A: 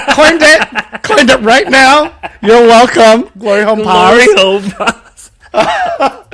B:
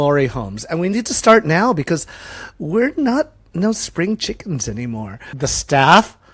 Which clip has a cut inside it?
B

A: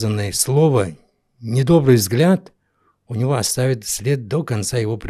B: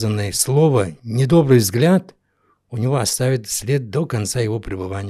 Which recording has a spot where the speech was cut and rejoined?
B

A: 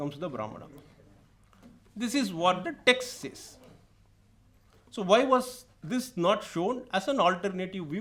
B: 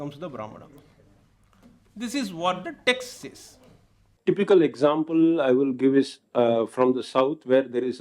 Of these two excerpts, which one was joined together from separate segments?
B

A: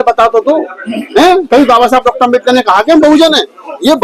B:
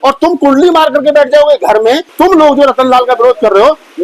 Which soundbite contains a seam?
B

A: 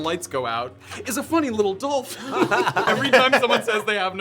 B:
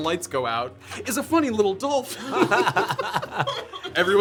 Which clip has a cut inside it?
A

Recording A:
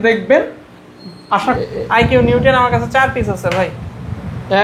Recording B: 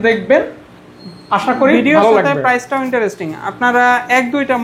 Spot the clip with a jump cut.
A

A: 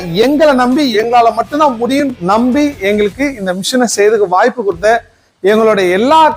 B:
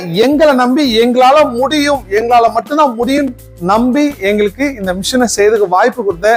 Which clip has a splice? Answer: A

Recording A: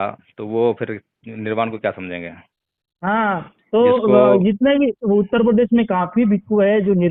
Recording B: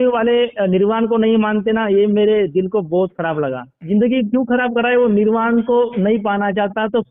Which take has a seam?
B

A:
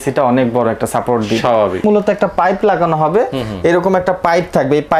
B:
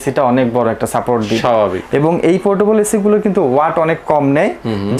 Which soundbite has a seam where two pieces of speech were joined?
A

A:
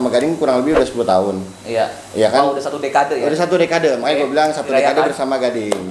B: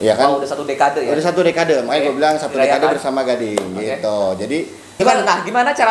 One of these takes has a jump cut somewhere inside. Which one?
B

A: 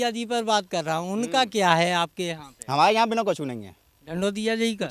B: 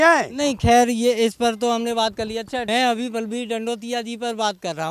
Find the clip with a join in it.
B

